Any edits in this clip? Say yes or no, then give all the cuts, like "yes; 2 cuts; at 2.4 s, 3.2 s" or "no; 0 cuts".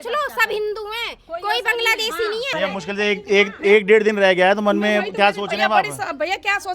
yes; 1 cut; at 2.5 s